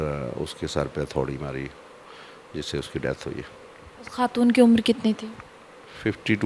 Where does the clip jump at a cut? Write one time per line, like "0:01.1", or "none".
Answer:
none